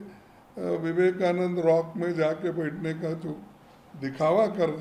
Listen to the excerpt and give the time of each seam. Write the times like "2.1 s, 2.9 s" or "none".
none